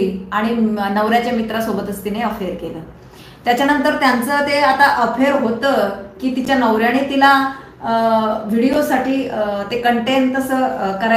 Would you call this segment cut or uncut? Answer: uncut